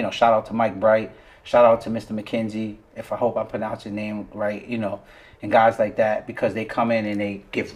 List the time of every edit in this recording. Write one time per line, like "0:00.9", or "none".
none